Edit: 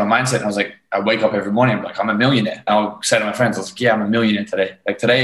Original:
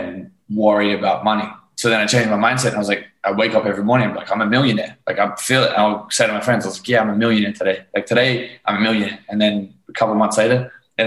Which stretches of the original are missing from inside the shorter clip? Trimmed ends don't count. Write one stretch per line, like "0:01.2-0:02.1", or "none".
0:05.0-0:05.7